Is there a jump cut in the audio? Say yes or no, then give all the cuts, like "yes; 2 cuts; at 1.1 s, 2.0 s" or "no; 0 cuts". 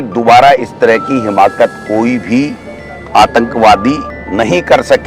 yes; 1 cut; at 4.1 s